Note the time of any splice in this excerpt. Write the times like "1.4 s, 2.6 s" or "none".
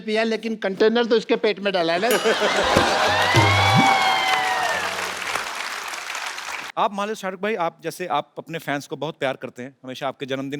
6.6 s